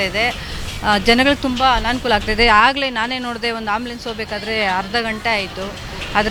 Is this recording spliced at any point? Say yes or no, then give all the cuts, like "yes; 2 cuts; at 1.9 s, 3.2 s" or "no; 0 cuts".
no; 0 cuts